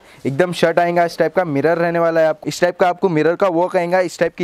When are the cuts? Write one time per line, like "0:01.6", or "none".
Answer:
0:02.4